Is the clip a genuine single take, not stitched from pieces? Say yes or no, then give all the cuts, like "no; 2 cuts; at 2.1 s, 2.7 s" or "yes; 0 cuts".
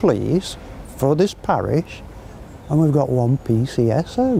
yes; 0 cuts